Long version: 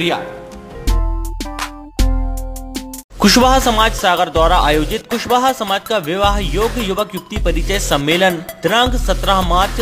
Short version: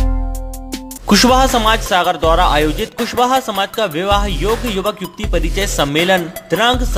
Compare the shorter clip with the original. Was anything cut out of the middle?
yes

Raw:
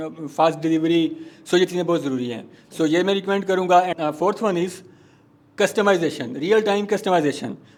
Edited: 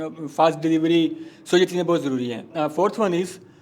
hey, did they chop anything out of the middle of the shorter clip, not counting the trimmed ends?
yes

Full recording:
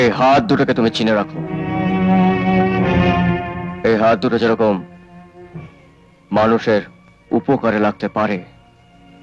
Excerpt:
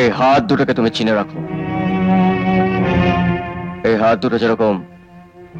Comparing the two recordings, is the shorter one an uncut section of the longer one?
yes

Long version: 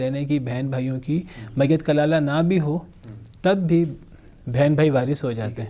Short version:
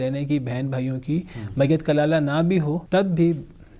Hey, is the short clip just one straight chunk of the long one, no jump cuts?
no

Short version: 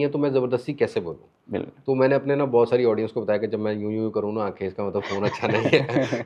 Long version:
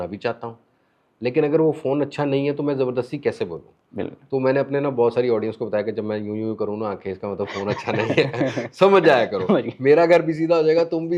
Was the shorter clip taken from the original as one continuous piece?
yes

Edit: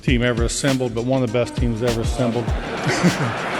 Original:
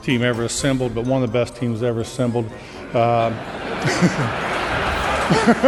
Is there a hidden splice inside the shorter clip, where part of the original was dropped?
yes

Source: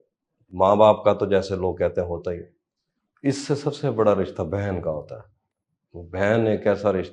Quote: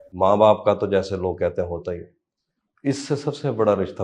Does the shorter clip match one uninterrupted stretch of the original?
yes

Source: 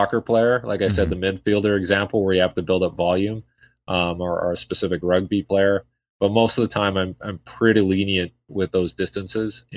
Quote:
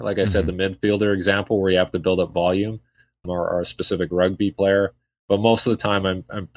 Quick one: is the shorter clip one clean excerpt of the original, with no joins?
no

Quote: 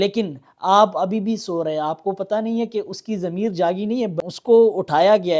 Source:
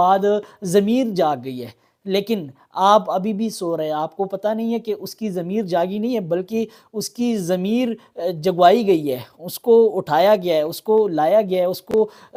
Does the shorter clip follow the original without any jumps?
no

